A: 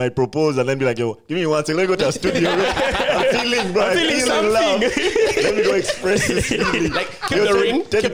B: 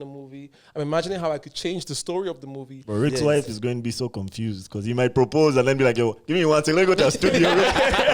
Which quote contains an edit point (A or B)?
B